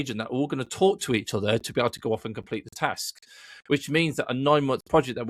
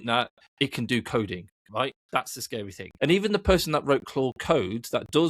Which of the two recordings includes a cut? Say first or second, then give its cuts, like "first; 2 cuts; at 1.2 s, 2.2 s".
second; 1 cut; at 2.4 s